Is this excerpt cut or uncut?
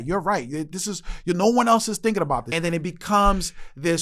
cut